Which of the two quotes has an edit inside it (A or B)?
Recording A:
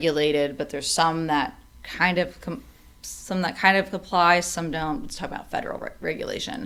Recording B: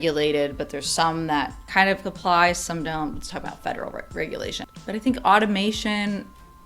B